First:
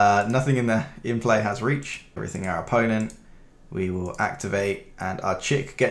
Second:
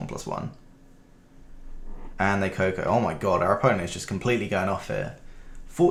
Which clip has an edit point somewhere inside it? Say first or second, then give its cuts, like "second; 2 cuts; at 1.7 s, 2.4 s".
first; 1 cut; at 2.2 s